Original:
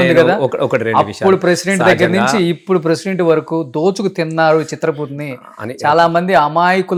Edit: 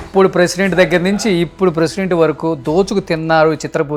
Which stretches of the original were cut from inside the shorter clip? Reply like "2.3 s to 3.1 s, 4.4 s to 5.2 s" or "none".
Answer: none

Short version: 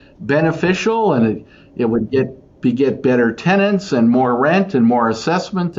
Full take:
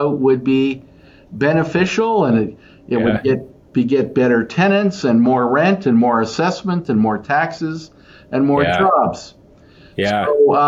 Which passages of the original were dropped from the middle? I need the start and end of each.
none

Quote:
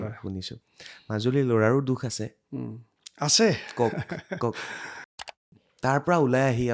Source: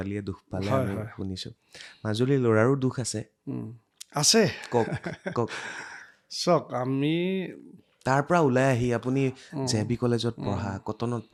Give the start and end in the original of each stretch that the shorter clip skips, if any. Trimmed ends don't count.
6.3 s to 7.6 s

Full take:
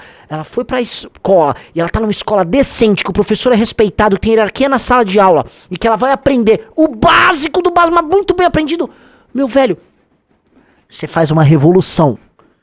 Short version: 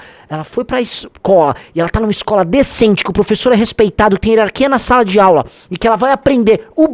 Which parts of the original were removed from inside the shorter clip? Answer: none

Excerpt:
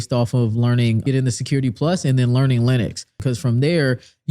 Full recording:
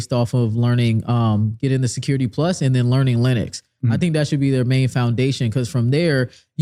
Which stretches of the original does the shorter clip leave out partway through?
1.0 s to 1.6 s, 3.7 s to 5.4 s

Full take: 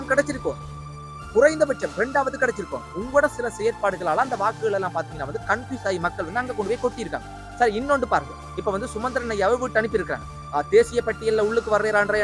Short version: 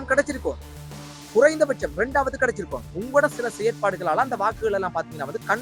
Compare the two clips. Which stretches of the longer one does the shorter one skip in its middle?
none

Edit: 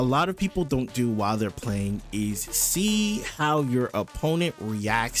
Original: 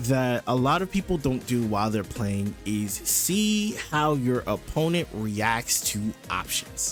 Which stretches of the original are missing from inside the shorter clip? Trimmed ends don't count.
none

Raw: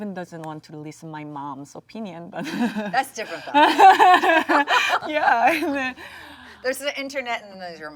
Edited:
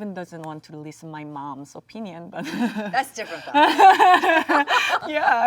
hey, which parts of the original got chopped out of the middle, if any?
none

